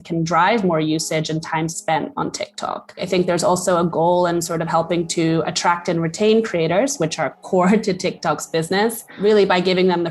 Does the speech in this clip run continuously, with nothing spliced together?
no; 2 cuts; at 2.9 s, 9.1 s

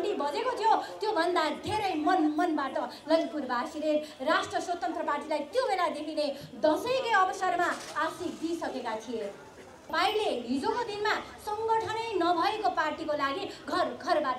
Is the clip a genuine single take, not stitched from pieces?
no; 1 cut; at 9.9 s

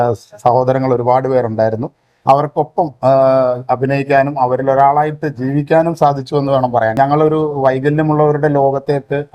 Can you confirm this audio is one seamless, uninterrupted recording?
no; 1 cut; at 6.9 s

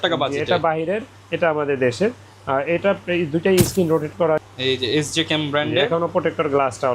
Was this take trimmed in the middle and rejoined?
yes; 1 cut; at 4.4 s

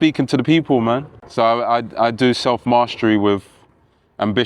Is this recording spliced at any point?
yes; 1 cut; at 1.2 s

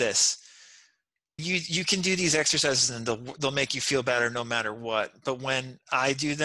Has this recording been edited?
yes; 1 cut; at 1.4 s

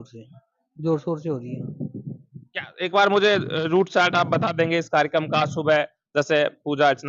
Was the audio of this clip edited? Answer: no; 0 cuts

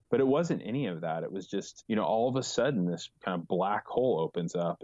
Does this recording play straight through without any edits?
no; 1 cut; at 1.7 s

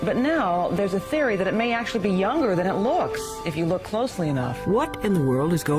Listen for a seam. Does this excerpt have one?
yes; 1 cut; at 2.5 s

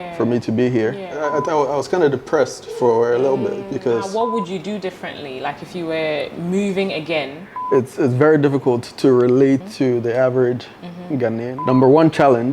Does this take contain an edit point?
yes; 4 cuts; at 1.2 s, 4.1 s, 7.5 s, 11.6 s

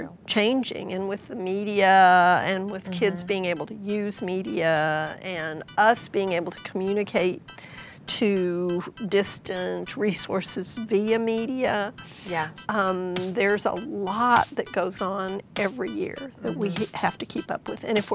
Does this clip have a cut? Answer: no; 0 cuts

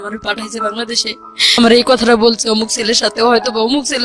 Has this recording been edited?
yes; 1 cut; at 1.6 s

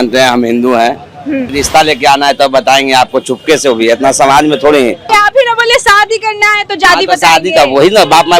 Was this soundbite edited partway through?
yes; 2 cuts; at 1.5 s, 5.1 s

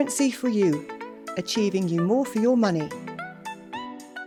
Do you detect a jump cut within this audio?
no; 0 cuts

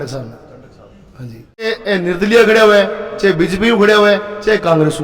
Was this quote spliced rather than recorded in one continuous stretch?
yes; 1 cut; at 1.8 s

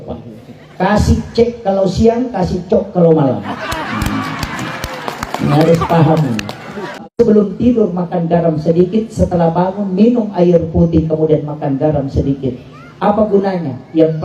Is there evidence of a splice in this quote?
yes; 1 cut; at 7.0 s

